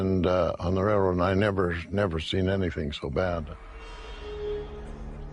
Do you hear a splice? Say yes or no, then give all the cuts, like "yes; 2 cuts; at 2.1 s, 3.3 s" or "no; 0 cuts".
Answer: yes; 1 cut; at 2.3 s